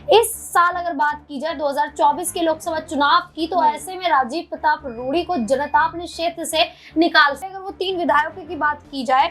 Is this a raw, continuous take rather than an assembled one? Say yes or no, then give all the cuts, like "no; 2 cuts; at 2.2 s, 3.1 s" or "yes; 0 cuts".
no; 1 cut; at 7.4 s